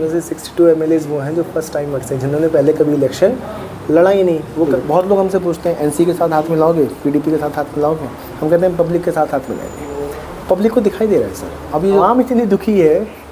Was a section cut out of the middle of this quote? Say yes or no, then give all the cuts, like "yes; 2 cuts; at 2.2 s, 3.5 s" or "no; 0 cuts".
yes; 2 cuts; at 4.7 s, 12.0 s